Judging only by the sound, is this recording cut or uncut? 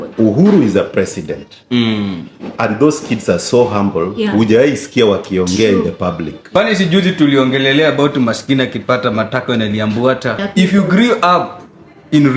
cut